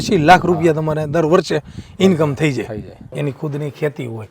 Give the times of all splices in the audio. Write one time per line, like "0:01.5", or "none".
0:03.1